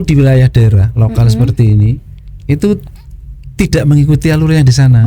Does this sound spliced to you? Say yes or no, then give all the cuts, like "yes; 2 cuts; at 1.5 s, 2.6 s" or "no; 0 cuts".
no; 0 cuts